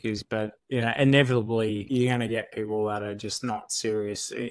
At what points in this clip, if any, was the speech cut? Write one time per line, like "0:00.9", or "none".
0:01.8